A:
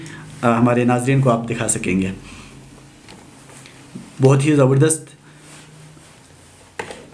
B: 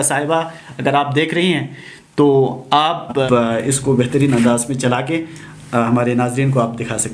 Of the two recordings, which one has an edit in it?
B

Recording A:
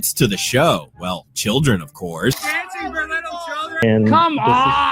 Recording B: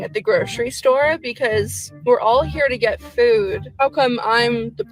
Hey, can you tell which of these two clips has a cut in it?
A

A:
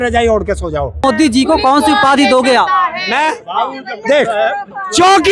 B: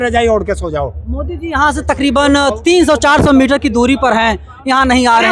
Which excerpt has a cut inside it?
A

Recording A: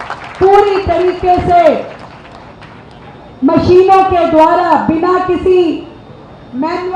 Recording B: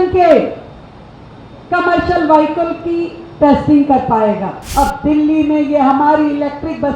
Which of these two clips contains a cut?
B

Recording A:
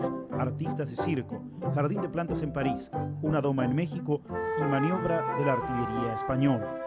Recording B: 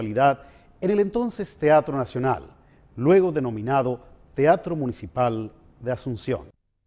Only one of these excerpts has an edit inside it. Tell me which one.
B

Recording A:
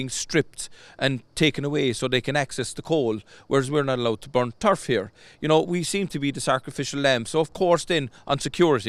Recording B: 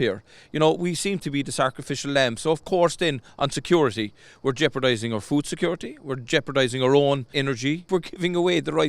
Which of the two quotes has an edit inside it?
B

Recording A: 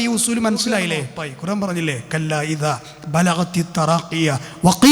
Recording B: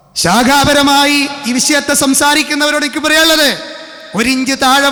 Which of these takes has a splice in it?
A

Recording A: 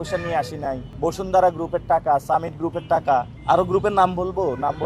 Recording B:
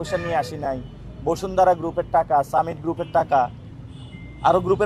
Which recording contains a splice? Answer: A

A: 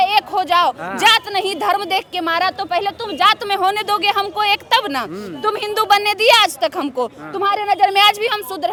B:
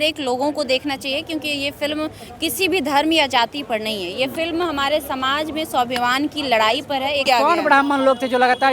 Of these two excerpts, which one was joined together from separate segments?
B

